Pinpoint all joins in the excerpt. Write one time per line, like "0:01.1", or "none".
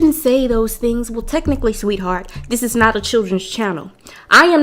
none